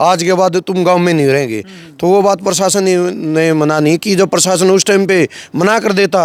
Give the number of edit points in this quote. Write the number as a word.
zero